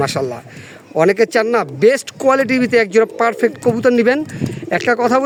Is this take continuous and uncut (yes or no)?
yes